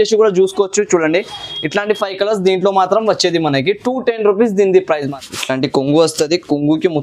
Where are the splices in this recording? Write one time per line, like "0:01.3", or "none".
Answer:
0:05.0